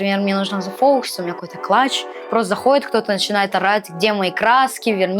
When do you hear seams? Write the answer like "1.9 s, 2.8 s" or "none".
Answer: none